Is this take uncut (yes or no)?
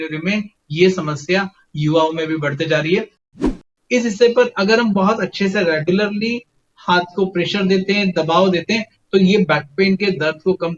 no